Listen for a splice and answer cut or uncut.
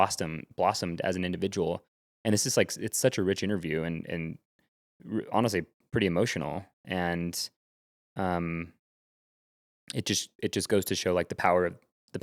uncut